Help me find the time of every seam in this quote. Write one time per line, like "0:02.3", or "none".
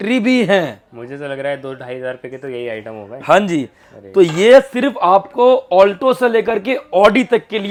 none